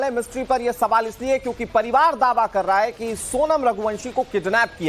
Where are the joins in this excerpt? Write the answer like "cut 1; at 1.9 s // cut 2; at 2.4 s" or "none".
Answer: cut 1; at 0.9 s

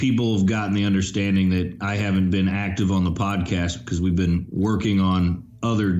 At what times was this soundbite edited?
none

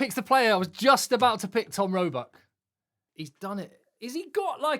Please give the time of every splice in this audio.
cut 1; at 3.0 s

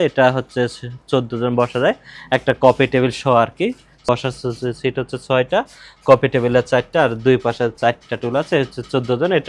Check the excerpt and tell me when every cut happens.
none

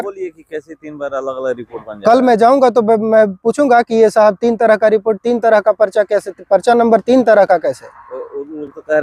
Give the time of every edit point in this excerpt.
none

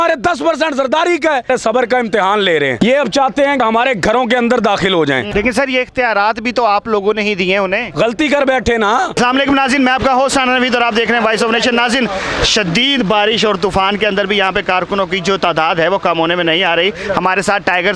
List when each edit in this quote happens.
cut 1; at 1.5 s // cut 2; at 2.8 s // cut 3; at 3.6 s // cut 4; at 5.2 s // cut 5; at 9.1 s

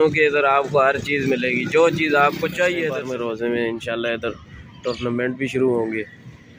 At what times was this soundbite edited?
cut 1; at 3.1 s

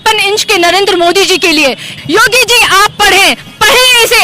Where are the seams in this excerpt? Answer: cut 1; at 2.0 s

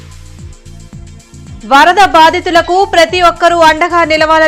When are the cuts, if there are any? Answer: none

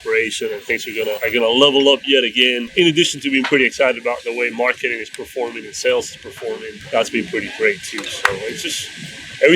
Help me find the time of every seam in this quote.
cut 1; at 1.2 s // cut 2; at 2.6 s // cut 3; at 6.7 s

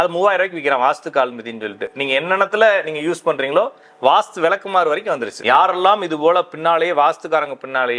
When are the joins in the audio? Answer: cut 1; at 5.3 s

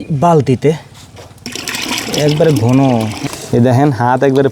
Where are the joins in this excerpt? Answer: cut 1; at 3.2 s

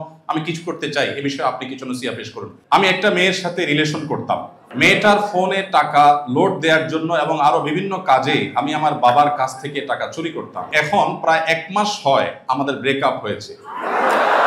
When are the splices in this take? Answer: cut 1; at 2.5 s // cut 2; at 4.6 s // cut 3; at 10.7 s

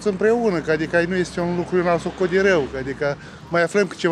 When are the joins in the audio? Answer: none

